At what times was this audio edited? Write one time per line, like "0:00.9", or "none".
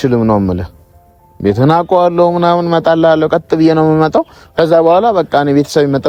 none